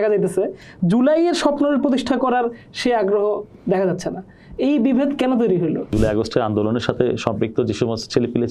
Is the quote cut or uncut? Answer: cut